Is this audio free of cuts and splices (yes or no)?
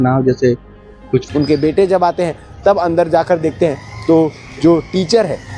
no